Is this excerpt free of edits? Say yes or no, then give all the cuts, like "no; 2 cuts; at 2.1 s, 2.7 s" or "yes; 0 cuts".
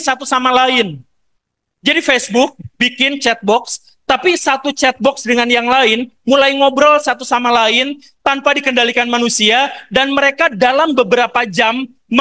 yes; 0 cuts